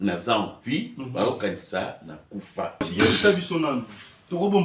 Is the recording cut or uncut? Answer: uncut